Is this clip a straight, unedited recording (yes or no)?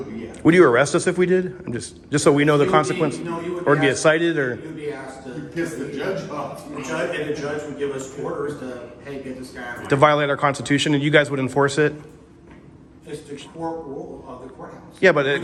yes